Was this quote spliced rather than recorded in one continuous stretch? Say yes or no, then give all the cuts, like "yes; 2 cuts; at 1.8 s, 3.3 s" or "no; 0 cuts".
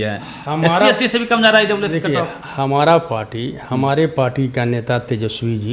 no; 0 cuts